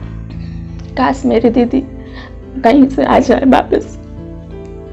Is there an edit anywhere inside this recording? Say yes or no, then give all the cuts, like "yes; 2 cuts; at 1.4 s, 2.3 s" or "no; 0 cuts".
yes; 2 cuts; at 0.9 s, 3.8 s